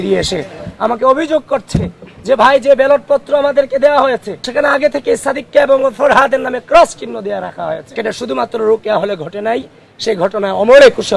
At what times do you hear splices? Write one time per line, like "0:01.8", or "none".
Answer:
0:04.3
0:07.9